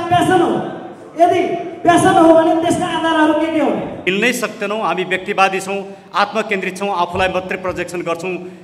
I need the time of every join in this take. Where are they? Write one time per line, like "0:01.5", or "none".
0:04.0